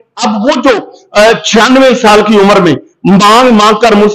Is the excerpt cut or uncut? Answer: uncut